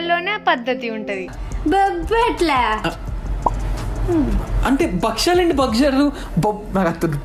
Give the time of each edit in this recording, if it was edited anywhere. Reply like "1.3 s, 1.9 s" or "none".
1.3 s